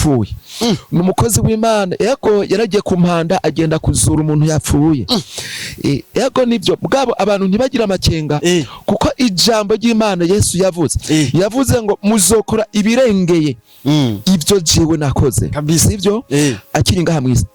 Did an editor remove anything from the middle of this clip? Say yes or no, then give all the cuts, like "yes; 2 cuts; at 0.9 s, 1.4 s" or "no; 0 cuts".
no; 0 cuts